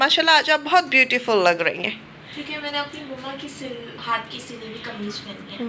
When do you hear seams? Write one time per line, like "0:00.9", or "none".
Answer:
none